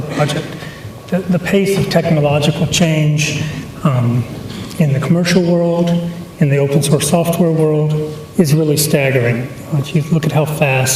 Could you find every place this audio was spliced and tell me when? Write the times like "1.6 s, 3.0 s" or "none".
1.6 s

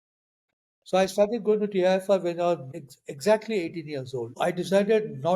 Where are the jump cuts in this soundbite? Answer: 2.7 s, 4.4 s

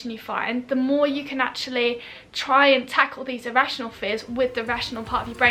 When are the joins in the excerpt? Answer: none

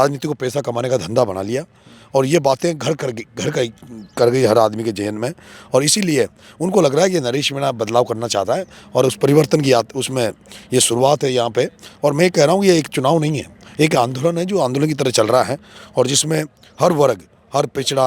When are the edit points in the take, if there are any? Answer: none

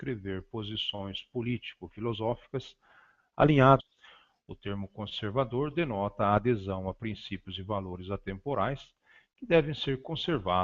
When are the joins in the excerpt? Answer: none

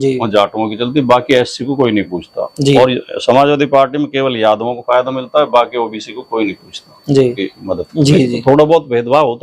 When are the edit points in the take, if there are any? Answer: 7.4 s

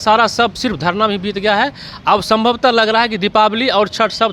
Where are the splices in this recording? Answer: none

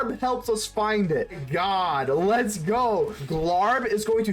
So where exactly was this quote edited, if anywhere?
1.4 s, 3.2 s

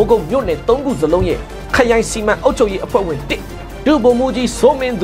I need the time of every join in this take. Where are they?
none

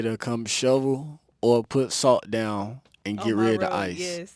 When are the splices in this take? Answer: none

